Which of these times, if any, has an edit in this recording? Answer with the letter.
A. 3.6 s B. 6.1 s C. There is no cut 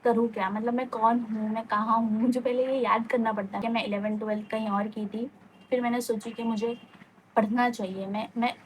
A